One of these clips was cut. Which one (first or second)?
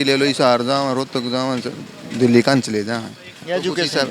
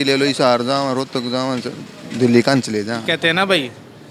second